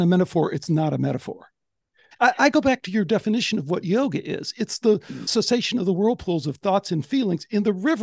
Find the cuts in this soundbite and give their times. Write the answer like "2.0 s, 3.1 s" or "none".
2.0 s